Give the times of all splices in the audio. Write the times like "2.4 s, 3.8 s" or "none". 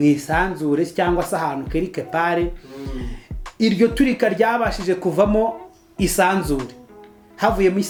none